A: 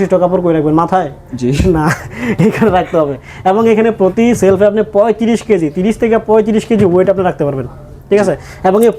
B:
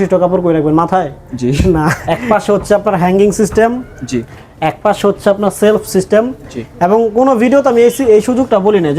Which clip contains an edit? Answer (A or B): B